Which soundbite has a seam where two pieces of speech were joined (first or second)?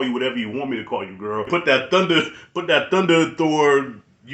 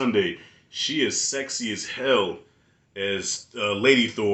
first